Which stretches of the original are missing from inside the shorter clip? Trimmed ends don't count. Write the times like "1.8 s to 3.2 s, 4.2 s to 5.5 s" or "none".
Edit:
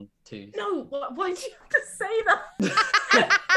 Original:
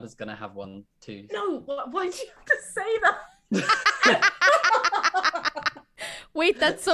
3.2 s to 3.4 s